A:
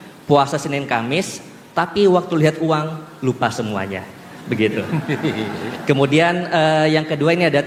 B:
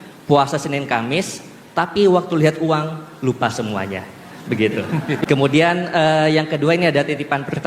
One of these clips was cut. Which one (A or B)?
B